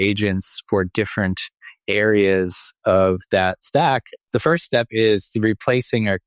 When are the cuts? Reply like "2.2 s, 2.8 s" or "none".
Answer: 4.1 s